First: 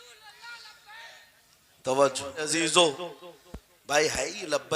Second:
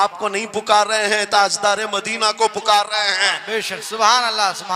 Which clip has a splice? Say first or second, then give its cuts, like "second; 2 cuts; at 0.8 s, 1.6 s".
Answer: first; 1 cut; at 2.5 s